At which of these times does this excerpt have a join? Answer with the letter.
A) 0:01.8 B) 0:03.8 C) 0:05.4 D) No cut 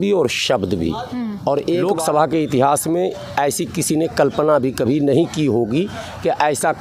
A